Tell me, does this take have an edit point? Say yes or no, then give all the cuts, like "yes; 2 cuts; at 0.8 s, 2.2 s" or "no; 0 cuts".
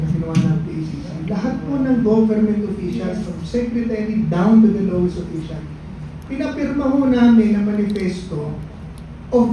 no; 0 cuts